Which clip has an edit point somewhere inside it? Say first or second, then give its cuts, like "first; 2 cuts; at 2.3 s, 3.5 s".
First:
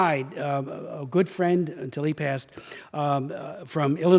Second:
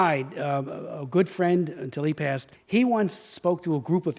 second; 1 cut; at 2.5 s